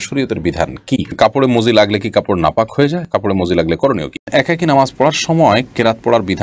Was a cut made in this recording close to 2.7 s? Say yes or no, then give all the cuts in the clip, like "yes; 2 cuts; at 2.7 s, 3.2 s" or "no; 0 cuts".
no; 2 cuts; at 1.1 s, 4.2 s